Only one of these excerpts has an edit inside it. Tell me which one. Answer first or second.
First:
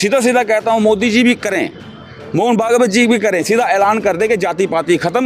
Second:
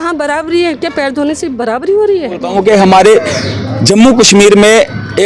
second